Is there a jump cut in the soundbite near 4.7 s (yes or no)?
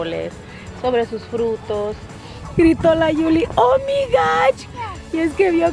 yes